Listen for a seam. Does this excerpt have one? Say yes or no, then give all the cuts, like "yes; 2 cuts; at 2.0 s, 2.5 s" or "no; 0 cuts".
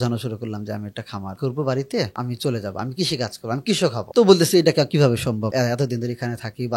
yes; 4 cuts; at 1.4 s, 2.1 s, 4.0 s, 5.5 s